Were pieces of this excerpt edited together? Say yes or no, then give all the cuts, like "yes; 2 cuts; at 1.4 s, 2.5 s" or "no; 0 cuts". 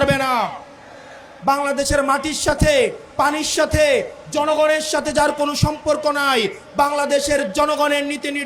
yes; 1 cut; at 1.3 s